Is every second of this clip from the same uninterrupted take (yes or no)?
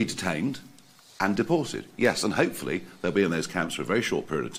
yes